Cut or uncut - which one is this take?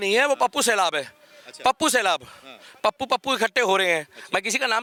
uncut